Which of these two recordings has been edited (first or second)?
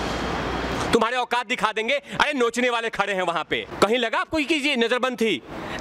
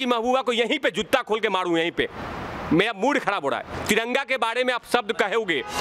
first